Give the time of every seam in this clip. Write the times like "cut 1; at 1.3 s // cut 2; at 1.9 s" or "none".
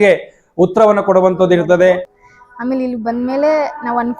cut 1; at 2.1 s

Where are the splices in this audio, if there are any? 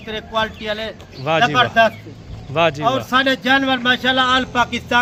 none

